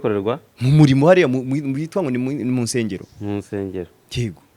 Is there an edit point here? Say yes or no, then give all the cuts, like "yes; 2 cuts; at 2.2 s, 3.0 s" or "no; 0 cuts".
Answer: no; 0 cuts